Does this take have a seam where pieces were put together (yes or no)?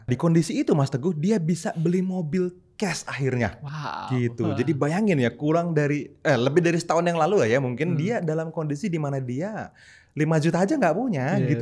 no